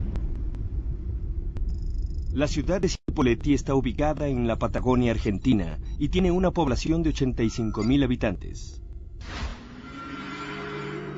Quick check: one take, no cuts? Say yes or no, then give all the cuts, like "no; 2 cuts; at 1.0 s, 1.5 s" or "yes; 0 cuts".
no; 1 cut; at 2.9 s